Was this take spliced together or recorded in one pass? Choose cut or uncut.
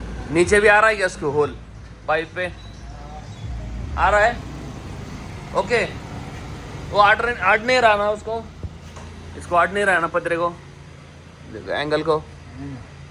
uncut